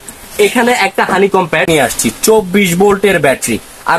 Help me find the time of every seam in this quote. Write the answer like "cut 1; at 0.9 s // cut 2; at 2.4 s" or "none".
cut 1; at 1.7 s